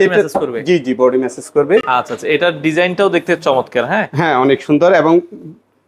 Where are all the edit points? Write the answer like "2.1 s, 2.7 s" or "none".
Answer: none